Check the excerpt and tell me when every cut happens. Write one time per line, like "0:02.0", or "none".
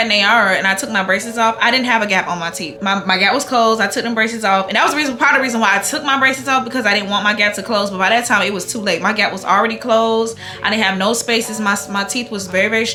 none